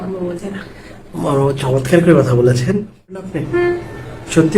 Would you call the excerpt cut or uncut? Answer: cut